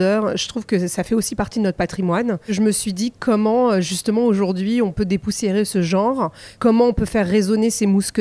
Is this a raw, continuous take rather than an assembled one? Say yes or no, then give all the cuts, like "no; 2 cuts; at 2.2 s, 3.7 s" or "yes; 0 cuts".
no; 2 cuts; at 2.5 s, 6.4 s